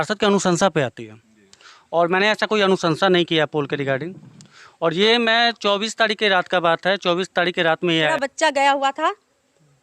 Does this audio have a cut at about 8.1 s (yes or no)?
yes